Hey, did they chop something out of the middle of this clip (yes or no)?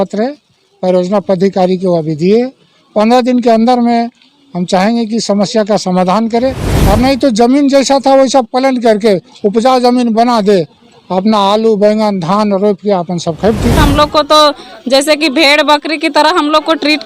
yes